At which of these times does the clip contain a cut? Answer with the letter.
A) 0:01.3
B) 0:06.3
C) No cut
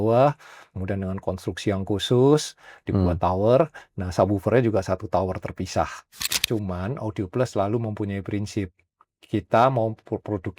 B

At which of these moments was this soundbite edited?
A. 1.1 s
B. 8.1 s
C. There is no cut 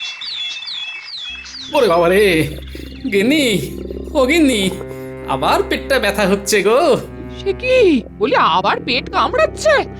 C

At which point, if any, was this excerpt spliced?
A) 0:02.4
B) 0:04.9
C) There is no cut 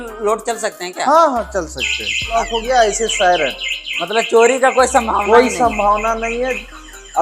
A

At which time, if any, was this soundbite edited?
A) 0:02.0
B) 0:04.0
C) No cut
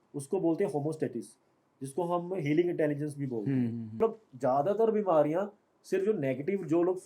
B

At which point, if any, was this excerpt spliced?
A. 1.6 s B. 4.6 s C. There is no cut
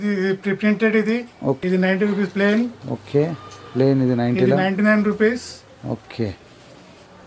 A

